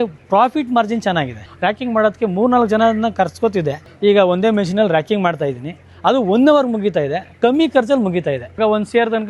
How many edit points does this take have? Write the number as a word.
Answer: three